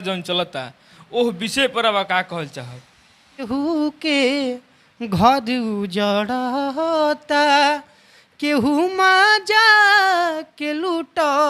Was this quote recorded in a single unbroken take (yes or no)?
no